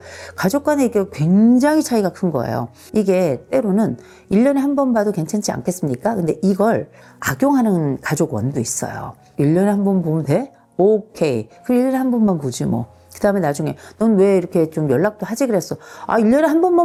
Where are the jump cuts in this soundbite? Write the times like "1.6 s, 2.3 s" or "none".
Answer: none